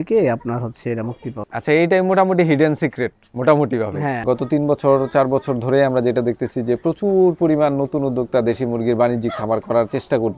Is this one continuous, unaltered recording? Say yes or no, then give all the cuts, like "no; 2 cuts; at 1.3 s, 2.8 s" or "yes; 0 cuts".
no; 1 cut; at 4.2 s